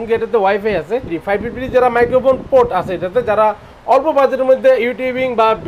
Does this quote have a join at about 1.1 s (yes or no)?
yes